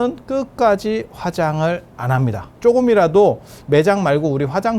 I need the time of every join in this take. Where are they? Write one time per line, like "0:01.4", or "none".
0:02.5